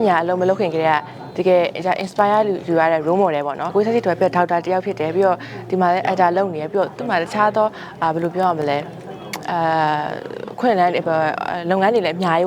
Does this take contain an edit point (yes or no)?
yes